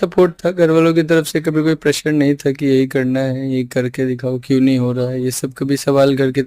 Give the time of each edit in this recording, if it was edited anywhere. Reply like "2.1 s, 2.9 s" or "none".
none